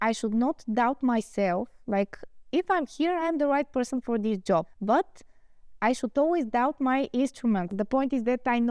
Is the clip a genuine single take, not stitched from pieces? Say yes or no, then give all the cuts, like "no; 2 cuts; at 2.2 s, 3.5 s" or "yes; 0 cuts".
no; 2 cuts; at 4.7 s, 7.7 s